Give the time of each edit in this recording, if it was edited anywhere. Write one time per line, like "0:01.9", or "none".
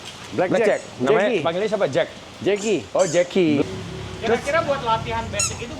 0:03.6